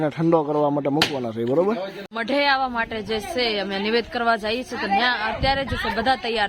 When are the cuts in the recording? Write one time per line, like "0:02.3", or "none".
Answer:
0:02.1